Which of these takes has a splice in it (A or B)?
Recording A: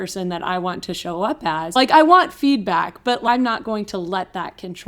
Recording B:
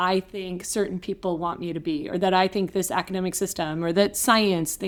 A